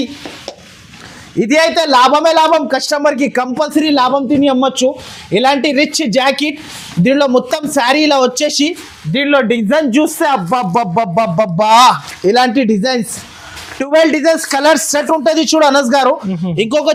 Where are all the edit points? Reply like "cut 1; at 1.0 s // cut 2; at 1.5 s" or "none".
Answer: none